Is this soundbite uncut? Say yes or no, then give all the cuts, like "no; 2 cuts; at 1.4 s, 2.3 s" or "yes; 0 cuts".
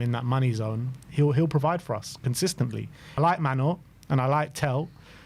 no; 1 cut; at 3.2 s